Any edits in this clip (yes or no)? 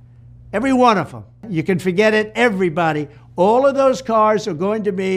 yes